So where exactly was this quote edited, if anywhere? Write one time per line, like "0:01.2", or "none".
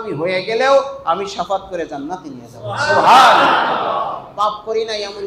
none

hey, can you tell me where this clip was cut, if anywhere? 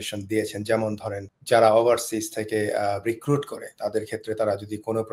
0:01.3

